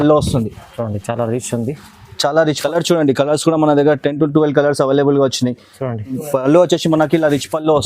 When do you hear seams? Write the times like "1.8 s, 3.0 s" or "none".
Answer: 2.6 s, 6.1 s